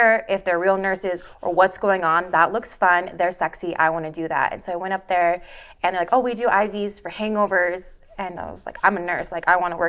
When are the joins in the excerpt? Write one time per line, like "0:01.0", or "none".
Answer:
none